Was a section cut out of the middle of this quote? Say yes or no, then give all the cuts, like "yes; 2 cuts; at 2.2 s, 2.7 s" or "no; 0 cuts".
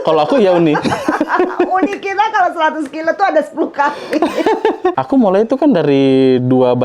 yes; 1 cut; at 5.0 s